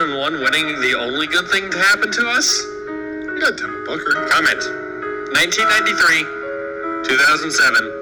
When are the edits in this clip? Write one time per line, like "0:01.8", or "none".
none